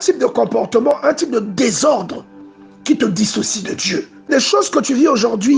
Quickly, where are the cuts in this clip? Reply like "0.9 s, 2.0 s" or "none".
4.3 s